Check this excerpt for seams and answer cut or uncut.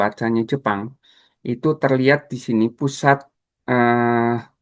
uncut